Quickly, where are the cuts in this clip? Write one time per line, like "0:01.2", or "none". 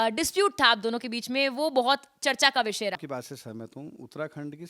0:03.0